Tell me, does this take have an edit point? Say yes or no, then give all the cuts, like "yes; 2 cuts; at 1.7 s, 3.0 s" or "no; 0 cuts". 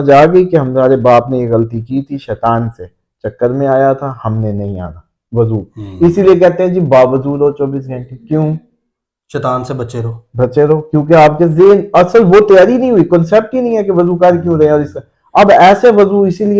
no; 0 cuts